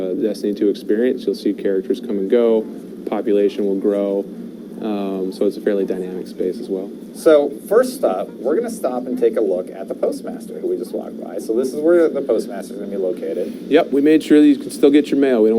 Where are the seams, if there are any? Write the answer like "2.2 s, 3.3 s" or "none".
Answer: 13.2 s